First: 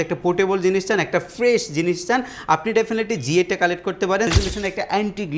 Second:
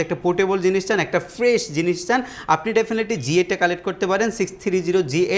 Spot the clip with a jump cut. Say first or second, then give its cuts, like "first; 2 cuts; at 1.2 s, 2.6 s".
first; 1 cut; at 4.3 s